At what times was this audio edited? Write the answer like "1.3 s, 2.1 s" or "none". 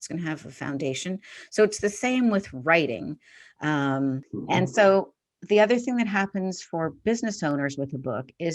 4.3 s